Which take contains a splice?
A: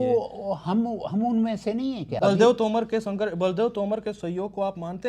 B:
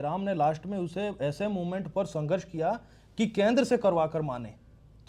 A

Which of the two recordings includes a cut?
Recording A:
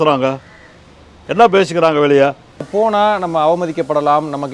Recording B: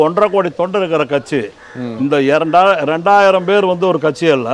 A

